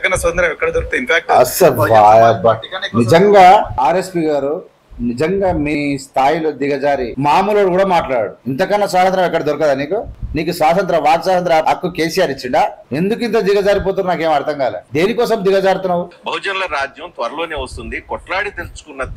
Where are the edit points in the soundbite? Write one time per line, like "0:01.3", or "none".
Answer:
0:03.7
0:05.8
0:07.1
0:08.4
0:10.2
0:11.6
0:12.8
0:14.8
0:16.2